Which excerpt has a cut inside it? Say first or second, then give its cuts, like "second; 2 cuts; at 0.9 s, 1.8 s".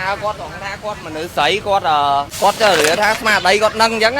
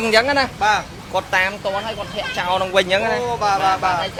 first; 1 cut; at 2.3 s